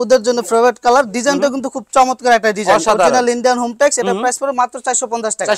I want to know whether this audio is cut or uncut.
uncut